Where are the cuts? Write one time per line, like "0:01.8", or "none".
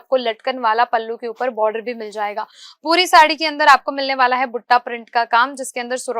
none